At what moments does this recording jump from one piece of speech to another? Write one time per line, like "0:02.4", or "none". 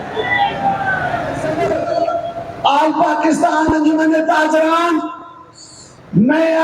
0:01.4